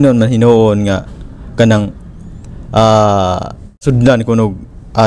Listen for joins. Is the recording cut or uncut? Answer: cut